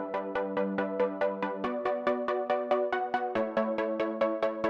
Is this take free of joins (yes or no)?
yes